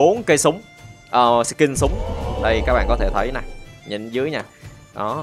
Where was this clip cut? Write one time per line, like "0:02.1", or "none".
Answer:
0:02.3